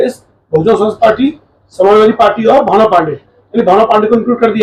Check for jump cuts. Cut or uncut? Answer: uncut